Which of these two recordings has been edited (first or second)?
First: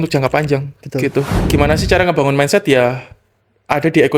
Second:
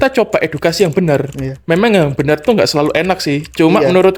first